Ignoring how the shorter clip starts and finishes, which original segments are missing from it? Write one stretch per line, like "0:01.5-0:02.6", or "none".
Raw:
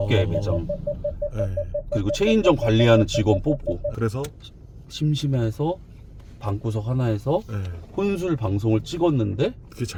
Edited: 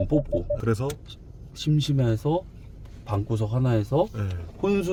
none